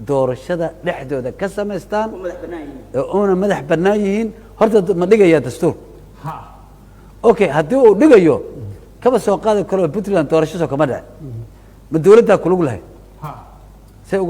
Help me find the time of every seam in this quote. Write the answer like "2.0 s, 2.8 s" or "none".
none